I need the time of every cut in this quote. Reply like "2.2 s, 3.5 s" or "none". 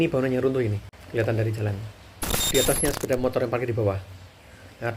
0.9 s, 2.5 s